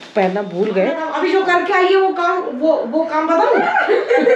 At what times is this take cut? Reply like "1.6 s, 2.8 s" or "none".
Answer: 1.1 s